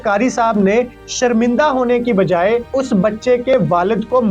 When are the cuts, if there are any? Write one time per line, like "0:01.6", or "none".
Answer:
0:02.7

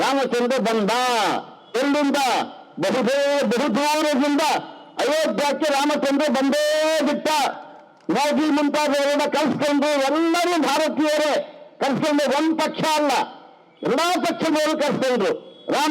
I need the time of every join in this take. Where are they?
none

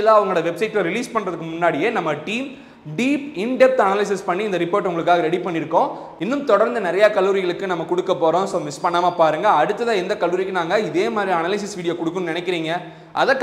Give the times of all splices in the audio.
none

